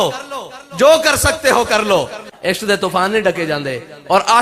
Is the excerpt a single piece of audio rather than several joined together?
no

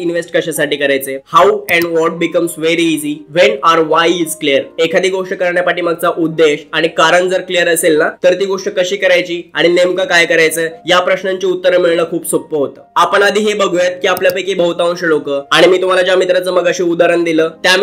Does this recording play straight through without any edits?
yes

